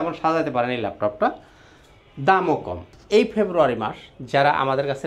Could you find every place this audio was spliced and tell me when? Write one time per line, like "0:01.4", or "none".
0:02.9

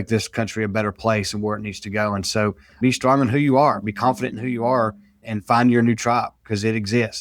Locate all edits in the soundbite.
0:02.7

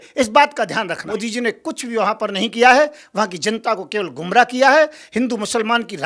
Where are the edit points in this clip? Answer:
0:01.2

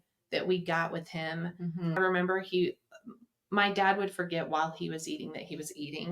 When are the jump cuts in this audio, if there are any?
0:02.0

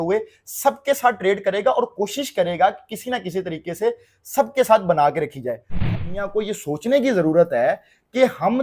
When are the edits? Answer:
0:06.0

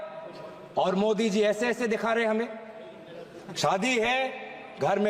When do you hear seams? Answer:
none

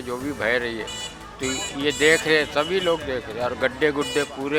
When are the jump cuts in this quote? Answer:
none

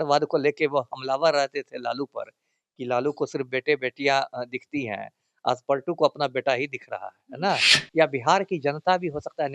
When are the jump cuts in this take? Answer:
0:07.8

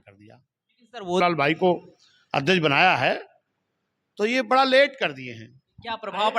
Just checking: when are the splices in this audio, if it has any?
0:01.2

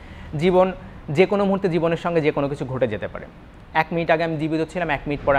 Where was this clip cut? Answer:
none

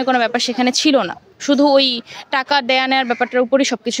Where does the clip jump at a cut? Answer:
none

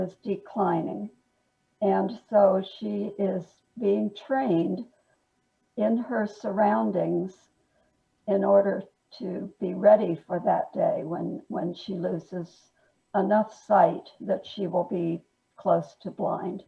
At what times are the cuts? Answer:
none

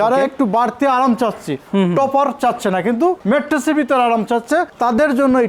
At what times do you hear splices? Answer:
none

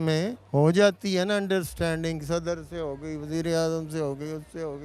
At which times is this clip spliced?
none

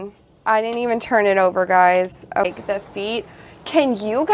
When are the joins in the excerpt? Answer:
0:02.4

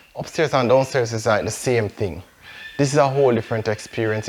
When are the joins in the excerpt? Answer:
none

